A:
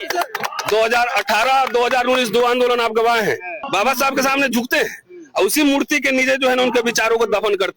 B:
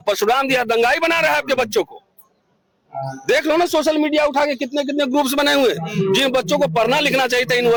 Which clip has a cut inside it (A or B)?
A